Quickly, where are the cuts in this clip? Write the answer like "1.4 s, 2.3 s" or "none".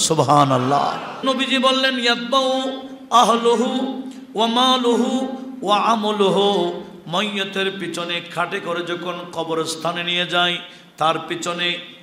1.2 s

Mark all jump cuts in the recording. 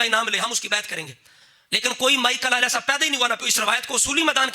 3.5 s

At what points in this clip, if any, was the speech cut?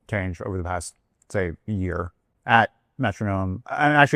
none

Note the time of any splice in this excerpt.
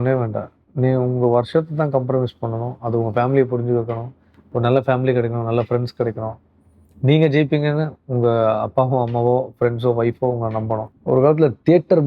10.9 s

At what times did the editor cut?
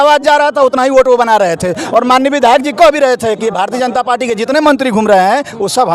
none

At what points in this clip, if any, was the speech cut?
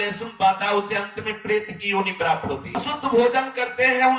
2.8 s

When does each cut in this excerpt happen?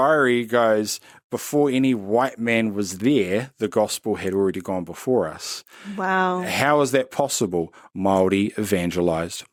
none

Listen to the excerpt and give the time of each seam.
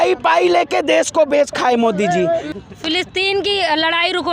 2.5 s

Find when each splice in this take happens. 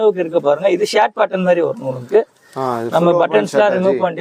none

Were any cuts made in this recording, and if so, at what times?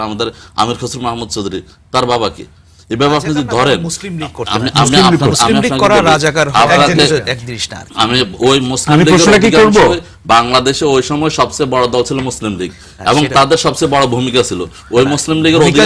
none

